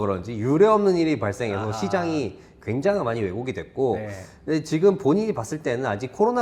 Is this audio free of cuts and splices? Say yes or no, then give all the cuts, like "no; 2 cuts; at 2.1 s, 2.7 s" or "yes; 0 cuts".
yes; 0 cuts